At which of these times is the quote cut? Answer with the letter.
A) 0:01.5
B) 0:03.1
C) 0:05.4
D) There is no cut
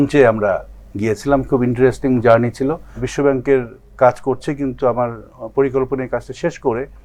B